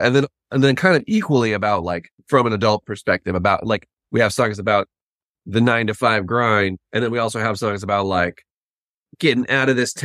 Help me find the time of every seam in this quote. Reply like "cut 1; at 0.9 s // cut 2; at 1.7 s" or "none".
cut 1; at 2.1 s